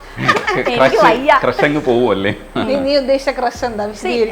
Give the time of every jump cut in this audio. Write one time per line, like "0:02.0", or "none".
0:02.4